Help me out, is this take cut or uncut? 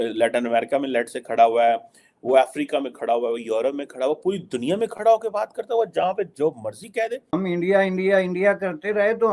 cut